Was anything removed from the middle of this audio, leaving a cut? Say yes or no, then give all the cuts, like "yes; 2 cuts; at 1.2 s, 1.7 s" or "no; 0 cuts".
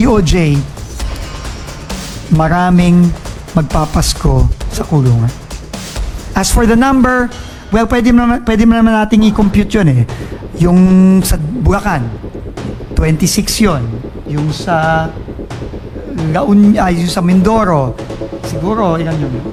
no; 0 cuts